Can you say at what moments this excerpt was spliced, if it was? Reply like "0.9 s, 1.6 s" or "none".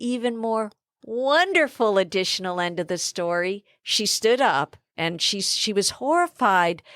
4.8 s